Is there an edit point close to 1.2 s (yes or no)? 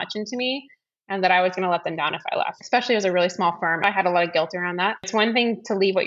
no